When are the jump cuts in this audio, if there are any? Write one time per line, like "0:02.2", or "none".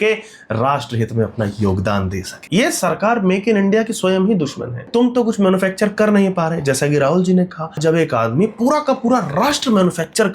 0:02.3
0:04.9
0:07.8